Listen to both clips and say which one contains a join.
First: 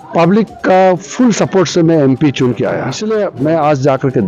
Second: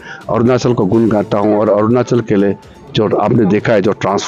first; 1 cut; at 2.9 s

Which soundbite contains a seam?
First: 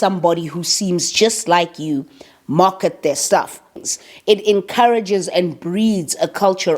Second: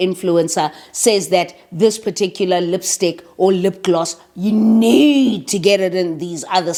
first; 1 cut; at 3.6 s

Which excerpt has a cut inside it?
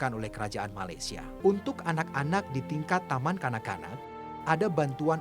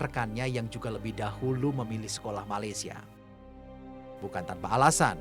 first; 1 cut; at 1.3 s

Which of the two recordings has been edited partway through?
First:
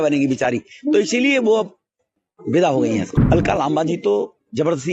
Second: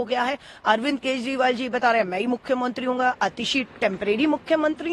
first; 1 cut; at 3.1 s

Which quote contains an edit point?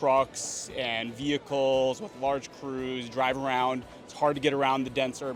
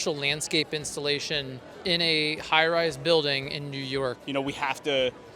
second; 2 cuts; at 1.6 s, 4.2 s

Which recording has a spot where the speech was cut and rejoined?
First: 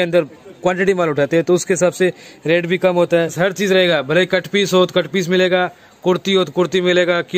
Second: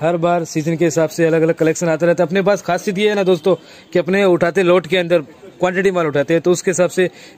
first; 1 cut; at 3.3 s

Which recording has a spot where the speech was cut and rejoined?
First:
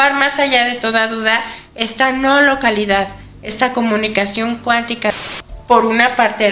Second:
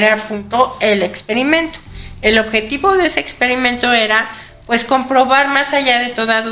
first; 1 cut; at 5.1 s

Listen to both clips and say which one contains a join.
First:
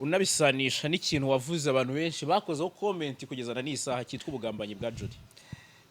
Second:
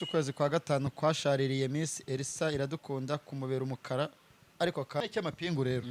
second; 1 cut; at 5.0 s

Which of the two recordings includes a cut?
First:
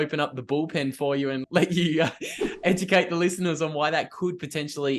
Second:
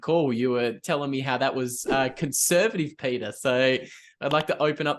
first; 1 cut; at 1.4 s

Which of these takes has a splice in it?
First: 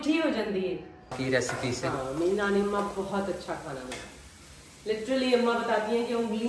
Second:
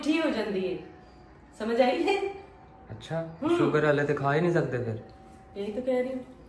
first; 1 cut; at 1.2 s

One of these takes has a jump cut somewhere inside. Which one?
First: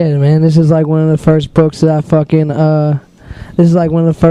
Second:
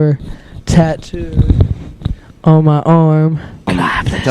second; 1 cut; at 3.4 s

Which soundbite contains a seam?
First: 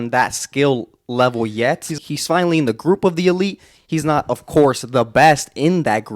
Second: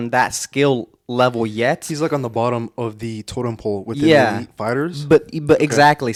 first; 1 cut; at 2.0 s

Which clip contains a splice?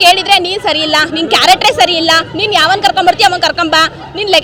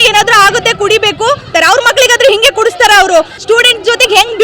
second; 2 cuts; at 1.5 s, 3.3 s

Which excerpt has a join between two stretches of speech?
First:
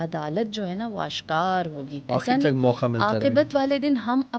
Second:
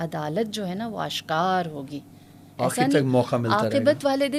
first; 1 cut; at 1.9 s

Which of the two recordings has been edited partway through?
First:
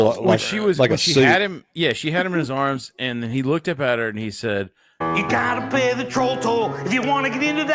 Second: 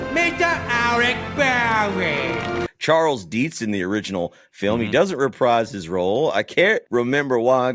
second; 2 cuts; at 2.6 s, 6.8 s

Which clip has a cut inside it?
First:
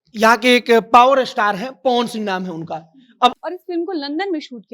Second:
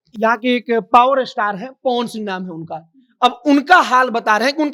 first; 1 cut; at 3.4 s

